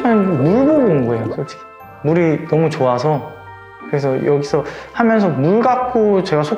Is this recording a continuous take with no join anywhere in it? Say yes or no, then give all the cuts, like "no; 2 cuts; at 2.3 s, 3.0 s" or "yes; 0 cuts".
yes; 0 cuts